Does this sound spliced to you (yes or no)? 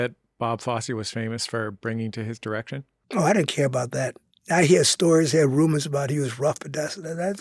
yes